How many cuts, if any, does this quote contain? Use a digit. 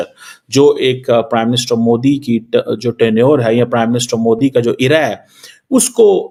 0